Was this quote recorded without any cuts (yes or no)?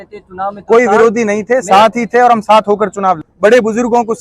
no